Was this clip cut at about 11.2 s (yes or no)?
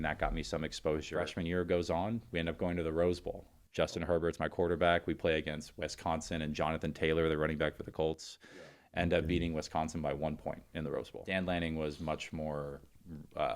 yes